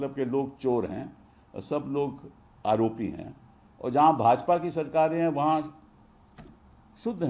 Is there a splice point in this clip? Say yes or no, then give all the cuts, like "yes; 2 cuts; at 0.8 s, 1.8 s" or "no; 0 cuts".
no; 0 cuts